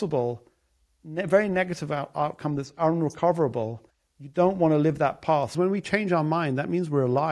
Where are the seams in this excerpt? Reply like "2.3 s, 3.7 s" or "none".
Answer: 5.5 s